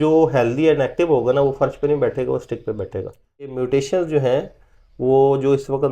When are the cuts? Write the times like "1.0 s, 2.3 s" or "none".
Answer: 3.6 s